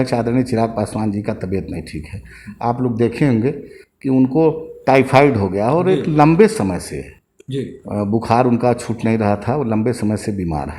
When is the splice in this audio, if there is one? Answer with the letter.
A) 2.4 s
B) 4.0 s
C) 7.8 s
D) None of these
D